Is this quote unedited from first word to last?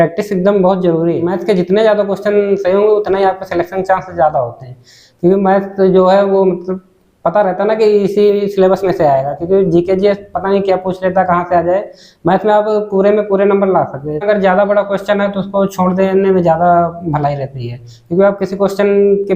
no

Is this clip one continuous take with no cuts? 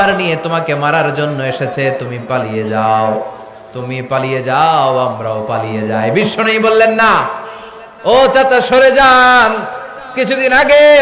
yes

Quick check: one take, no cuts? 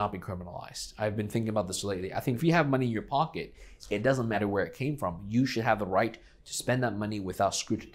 no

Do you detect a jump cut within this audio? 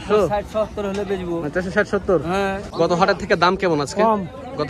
yes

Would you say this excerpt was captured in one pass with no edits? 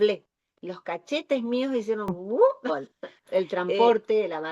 no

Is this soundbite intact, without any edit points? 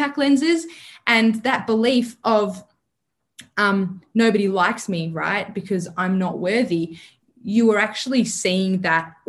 yes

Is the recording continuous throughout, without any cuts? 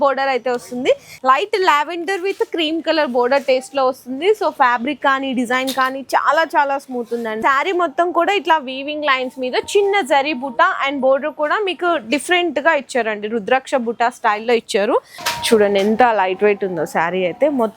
no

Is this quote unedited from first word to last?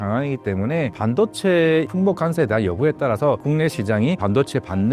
no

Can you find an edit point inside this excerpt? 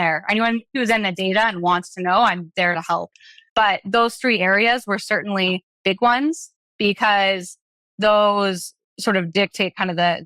no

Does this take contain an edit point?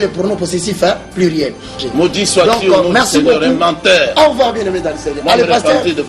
yes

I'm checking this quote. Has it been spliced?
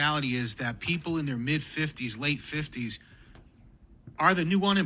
no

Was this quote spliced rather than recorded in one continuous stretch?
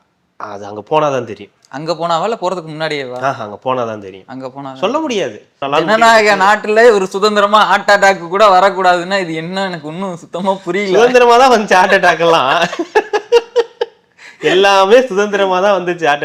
yes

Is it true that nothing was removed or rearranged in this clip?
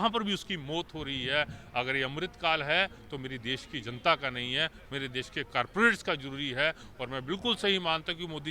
yes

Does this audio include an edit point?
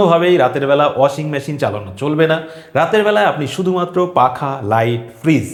no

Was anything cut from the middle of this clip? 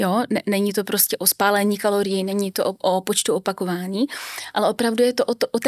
no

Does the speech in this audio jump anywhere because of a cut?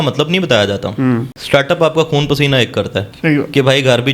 yes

